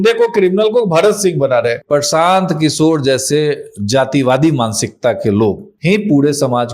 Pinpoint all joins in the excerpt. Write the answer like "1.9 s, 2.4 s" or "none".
1.8 s, 5.7 s

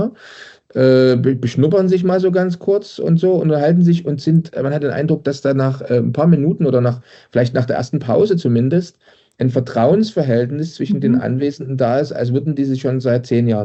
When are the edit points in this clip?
none

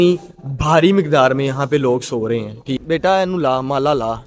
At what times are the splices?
2.8 s

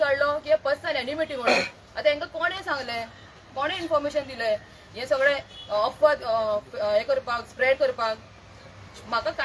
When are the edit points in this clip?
none

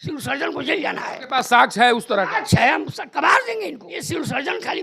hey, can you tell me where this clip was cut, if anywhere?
3.9 s

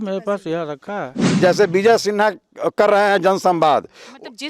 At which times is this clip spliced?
1.3 s

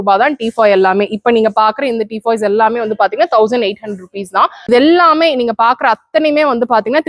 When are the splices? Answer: 4.6 s

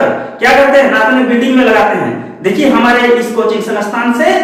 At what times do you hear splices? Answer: none

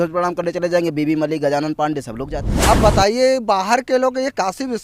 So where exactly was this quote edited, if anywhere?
2.5 s

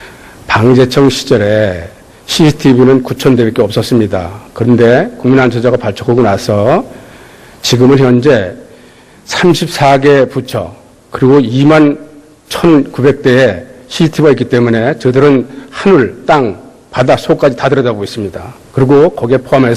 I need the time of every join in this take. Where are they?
7.8 s

